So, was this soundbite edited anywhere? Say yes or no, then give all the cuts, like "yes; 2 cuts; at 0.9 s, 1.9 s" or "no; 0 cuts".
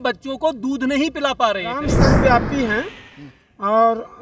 yes; 1 cut; at 1.8 s